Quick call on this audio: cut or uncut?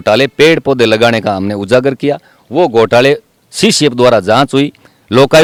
uncut